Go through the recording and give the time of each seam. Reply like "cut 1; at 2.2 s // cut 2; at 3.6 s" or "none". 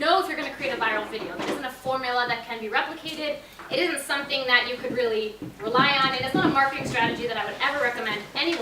none